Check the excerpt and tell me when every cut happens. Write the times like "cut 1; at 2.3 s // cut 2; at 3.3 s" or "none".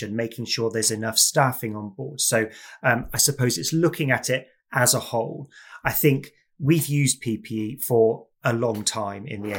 none